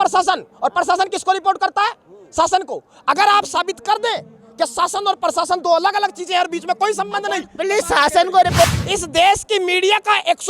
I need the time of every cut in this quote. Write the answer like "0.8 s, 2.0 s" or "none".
8.6 s